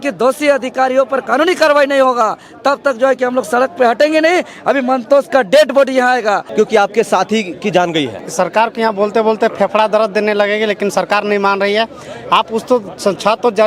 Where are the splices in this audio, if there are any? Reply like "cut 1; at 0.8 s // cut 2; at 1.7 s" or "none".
cut 1; at 6.5 s // cut 2; at 8.2 s